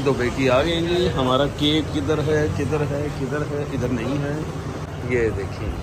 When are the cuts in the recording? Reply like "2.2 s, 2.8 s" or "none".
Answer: 4.9 s